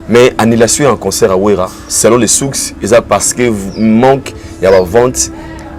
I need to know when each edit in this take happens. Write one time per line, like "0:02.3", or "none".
none